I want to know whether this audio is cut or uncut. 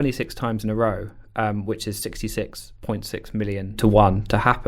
cut